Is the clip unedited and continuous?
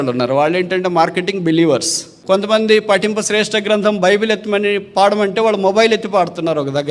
no; 1 cut; at 2.2 s

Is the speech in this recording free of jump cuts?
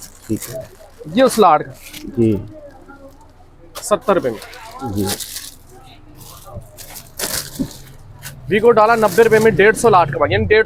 yes; 0 cuts

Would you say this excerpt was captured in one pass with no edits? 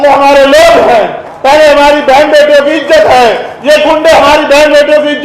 yes; 0 cuts

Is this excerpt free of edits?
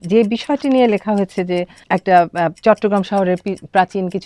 no; 1 cut; at 1.8 s

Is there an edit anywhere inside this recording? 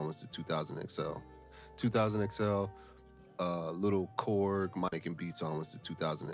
yes; 1 cut; at 4.9 s

